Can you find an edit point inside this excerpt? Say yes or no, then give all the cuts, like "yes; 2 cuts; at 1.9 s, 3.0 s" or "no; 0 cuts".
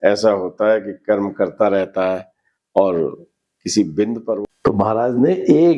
yes; 1 cut; at 4.4 s